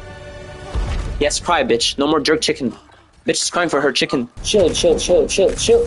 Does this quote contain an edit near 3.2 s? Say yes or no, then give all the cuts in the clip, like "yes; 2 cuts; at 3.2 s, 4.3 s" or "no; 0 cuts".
no; 1 cut; at 4.4 s